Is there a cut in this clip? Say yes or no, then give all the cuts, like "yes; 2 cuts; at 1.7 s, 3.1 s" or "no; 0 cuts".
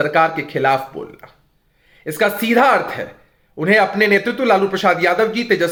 no; 0 cuts